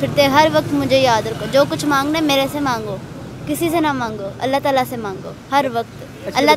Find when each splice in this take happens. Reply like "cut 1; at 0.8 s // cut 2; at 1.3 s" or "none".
none